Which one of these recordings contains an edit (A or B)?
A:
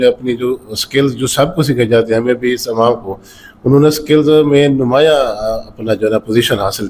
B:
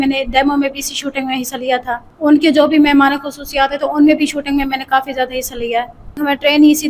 B